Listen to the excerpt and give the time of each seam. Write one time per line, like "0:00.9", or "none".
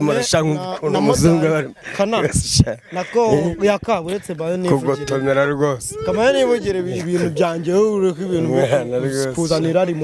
none